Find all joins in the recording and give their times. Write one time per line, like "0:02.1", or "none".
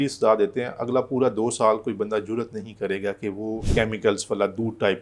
0:03.7